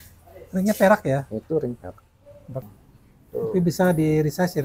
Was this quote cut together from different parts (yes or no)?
yes